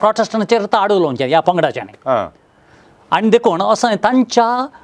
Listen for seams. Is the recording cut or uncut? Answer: uncut